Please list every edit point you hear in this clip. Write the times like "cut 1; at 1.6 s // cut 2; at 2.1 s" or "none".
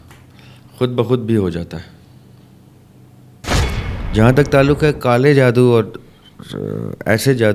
cut 1; at 3.7 s

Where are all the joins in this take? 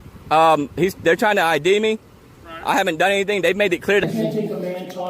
cut 1; at 4.0 s

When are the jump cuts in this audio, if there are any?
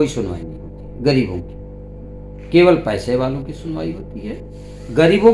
none

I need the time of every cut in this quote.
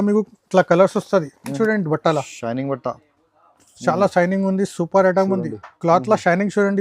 cut 1; at 1.5 s

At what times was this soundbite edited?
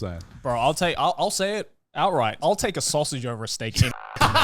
cut 1; at 2.3 s

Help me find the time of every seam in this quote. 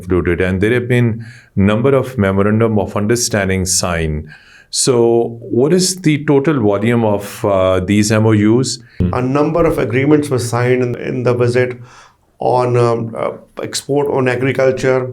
cut 1; at 9.1 s // cut 2; at 10.9 s

